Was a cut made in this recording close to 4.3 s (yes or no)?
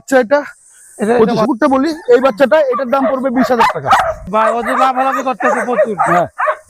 yes